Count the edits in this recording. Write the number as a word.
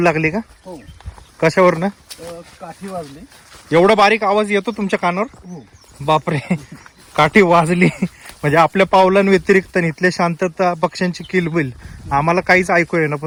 zero